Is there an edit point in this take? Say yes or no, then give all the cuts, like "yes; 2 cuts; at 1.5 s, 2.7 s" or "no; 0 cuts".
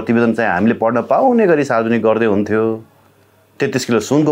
no; 0 cuts